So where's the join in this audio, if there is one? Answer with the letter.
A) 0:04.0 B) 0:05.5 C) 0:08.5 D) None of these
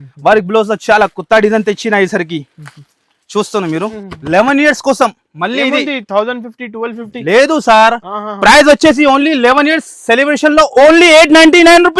A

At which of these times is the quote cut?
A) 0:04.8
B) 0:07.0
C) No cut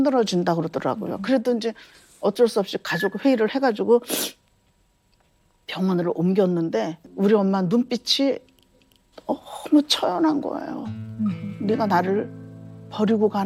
B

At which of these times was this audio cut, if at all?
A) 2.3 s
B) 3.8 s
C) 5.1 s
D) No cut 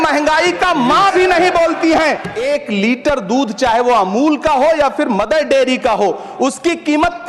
A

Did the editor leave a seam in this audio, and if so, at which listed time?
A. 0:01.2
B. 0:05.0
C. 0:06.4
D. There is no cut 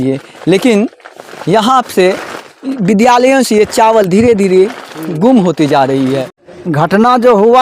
C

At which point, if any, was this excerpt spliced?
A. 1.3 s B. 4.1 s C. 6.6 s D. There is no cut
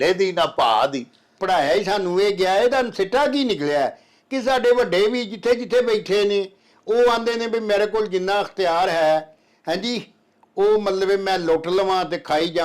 A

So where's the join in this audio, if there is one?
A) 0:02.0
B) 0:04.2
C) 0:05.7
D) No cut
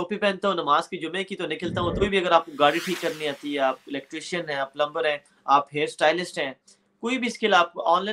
A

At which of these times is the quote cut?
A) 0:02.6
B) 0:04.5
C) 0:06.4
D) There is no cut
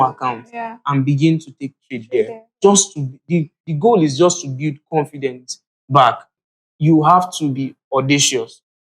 C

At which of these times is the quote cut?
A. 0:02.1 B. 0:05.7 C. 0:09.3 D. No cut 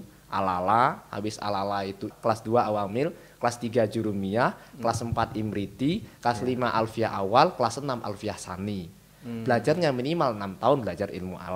A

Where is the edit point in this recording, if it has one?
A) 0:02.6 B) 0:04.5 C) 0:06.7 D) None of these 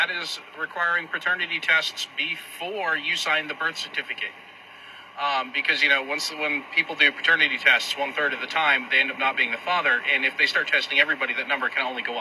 D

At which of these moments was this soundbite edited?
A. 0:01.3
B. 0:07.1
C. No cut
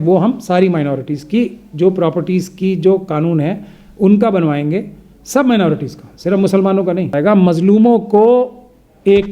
B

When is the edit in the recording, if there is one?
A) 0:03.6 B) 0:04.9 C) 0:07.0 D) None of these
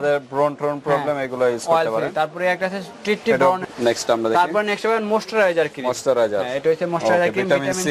A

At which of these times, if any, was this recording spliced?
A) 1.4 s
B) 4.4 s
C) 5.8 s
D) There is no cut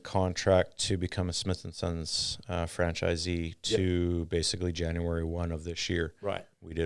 A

